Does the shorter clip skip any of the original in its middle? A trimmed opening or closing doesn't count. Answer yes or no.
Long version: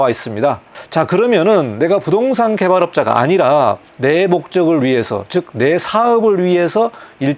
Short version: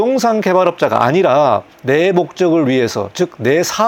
no